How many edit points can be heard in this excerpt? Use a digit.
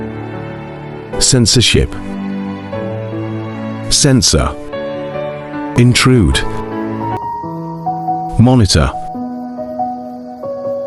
1